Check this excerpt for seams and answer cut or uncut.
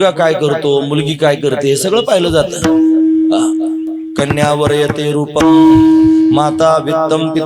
uncut